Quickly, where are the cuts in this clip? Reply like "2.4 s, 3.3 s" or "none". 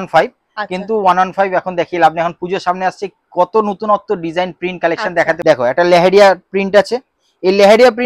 5.4 s